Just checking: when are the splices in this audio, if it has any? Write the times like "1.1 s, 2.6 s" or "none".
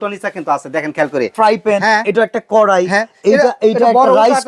1.3 s

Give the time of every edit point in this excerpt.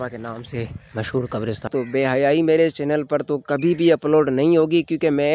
1.7 s

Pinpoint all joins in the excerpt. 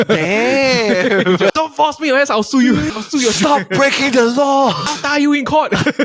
1.5 s, 2.9 s, 4.8 s

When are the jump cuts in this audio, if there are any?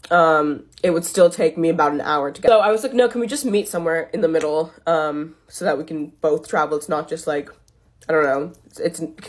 2.4 s

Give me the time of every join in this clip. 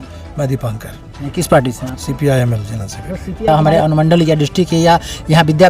3.5 s

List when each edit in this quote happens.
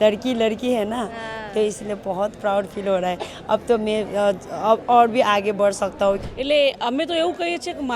6.3 s

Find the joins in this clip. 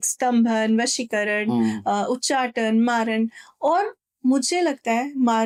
none

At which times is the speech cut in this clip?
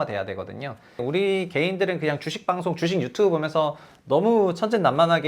1.0 s

